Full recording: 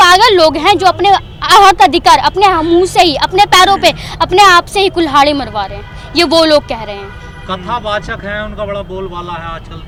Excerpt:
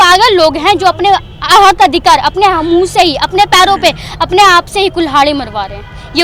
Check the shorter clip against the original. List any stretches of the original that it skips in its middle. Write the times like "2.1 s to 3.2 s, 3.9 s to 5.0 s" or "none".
none